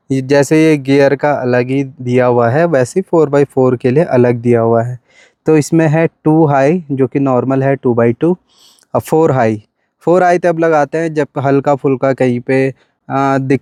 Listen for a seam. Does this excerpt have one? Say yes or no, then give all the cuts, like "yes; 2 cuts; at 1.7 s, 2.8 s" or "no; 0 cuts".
no; 0 cuts